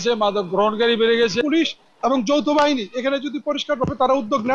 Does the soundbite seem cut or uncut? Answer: cut